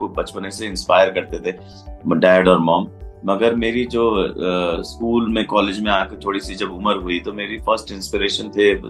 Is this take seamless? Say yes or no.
yes